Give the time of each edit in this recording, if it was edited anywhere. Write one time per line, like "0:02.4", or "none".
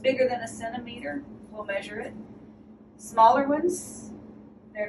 none

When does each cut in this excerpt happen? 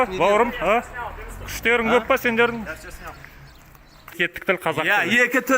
0:04.2

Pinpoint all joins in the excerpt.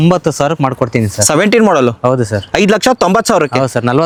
none

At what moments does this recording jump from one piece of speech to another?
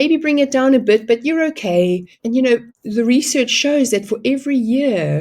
0:02.1
0:02.8

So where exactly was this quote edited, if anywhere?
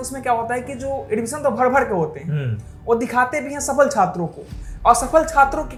none

